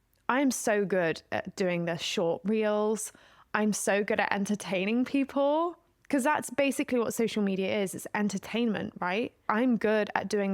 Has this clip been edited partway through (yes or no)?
yes